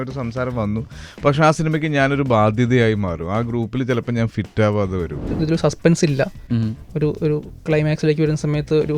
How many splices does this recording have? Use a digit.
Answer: 1